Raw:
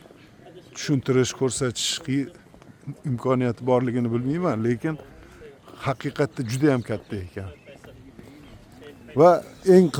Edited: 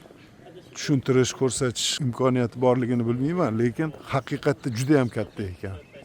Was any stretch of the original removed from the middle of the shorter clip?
yes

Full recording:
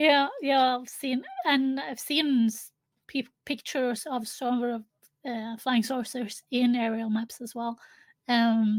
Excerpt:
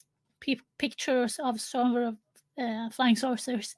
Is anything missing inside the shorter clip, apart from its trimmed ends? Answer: no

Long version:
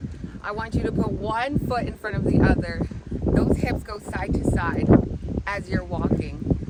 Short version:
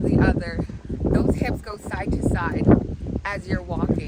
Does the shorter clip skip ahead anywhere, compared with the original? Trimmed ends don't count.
no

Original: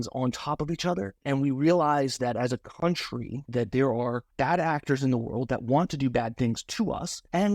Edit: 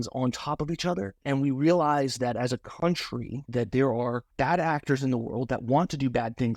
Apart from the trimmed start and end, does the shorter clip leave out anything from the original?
no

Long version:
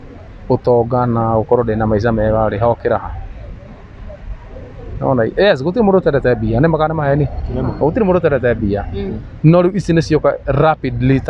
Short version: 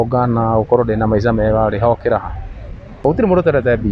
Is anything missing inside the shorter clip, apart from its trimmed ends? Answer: yes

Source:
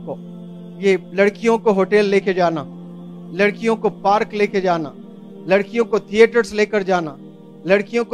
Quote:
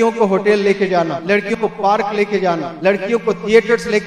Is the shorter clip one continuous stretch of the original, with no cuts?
no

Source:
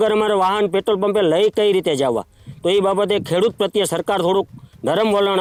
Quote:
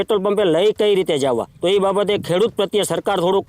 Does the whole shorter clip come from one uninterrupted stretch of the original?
no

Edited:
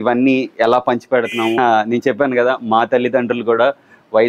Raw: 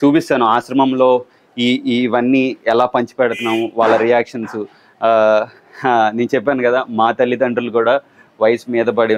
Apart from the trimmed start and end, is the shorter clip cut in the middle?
yes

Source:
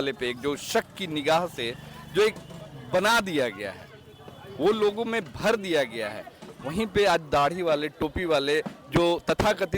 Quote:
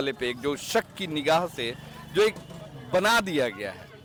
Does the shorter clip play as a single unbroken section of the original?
yes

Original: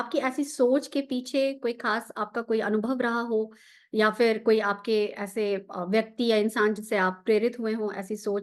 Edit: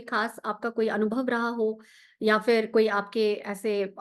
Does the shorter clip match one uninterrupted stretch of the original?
yes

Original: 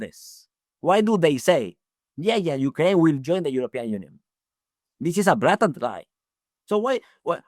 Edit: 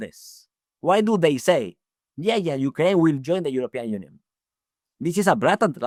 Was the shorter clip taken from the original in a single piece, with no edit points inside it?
yes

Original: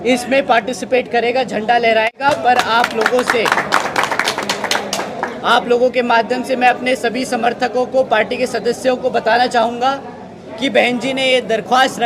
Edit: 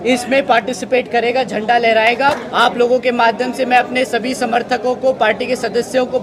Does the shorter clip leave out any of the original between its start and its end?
yes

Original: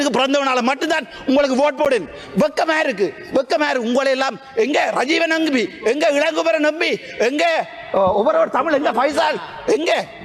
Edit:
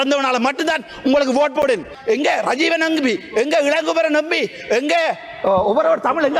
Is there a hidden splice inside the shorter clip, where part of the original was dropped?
yes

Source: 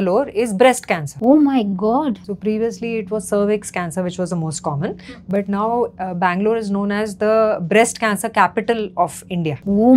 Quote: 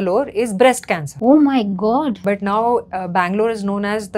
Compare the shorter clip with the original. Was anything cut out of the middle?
yes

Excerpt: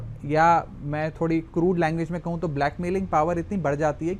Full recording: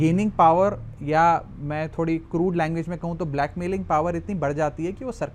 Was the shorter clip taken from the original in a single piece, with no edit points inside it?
yes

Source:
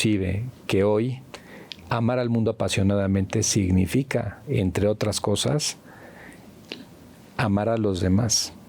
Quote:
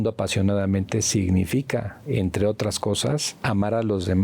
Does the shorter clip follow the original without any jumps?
no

